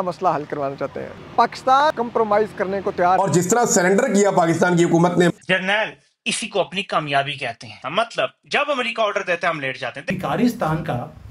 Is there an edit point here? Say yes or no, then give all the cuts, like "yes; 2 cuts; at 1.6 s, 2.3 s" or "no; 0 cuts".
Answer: yes; 4 cuts; at 1.9 s, 3.2 s, 5.3 s, 10.1 s